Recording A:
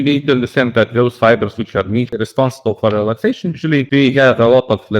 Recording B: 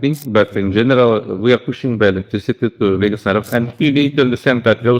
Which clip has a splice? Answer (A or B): A